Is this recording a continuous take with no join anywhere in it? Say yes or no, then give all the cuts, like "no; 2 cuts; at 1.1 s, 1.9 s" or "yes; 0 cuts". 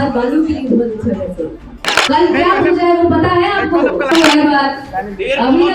no; 2 cuts; at 1.9 s, 4.1 s